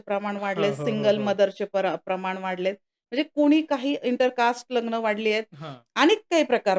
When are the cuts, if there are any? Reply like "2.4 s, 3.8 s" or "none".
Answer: none